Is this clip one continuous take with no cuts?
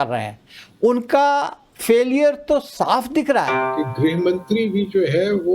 no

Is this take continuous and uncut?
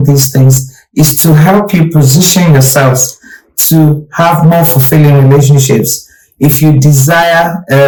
yes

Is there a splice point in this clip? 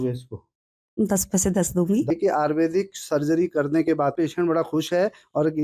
yes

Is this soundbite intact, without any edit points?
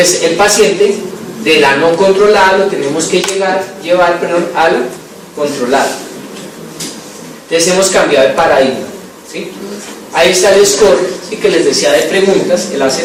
yes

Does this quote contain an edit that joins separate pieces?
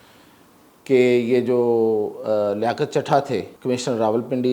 yes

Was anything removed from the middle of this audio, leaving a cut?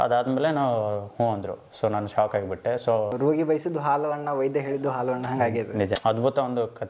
yes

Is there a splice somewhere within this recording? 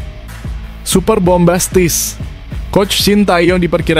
yes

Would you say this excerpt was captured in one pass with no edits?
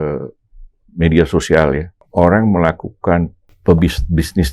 no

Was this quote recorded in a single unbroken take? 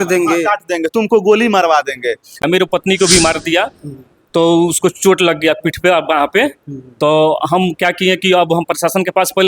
no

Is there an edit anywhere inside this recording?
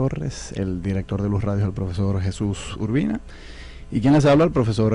no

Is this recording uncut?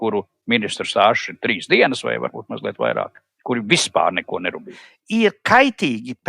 no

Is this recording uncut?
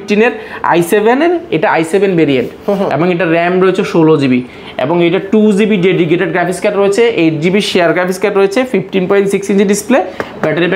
yes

